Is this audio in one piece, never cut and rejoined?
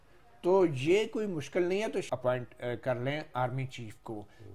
no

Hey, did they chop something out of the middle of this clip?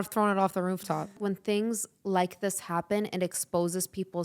yes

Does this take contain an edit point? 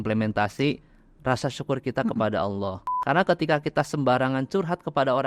yes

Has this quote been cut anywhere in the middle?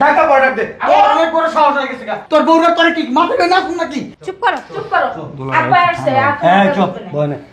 no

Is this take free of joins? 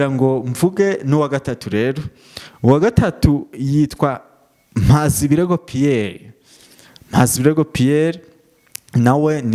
yes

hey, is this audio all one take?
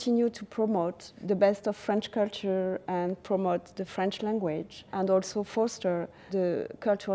no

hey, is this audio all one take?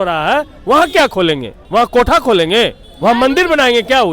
no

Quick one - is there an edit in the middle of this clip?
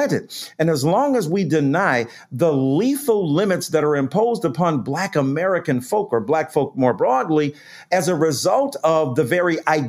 no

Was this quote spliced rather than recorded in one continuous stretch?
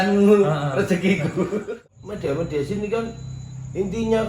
yes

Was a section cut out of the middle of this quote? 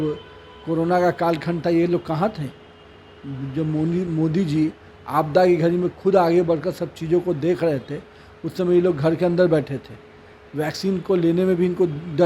no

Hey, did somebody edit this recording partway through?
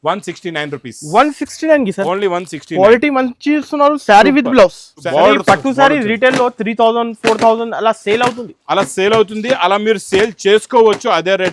yes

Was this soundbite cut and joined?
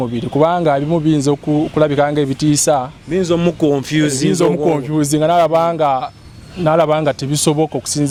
no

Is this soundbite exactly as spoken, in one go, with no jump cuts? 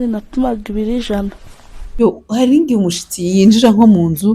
no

